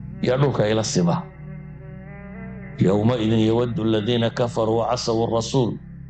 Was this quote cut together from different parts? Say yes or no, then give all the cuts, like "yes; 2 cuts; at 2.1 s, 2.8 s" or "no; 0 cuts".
no; 0 cuts